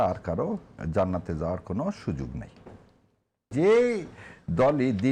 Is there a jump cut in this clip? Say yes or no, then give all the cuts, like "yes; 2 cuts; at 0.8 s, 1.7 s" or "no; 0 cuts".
yes; 1 cut; at 3.5 s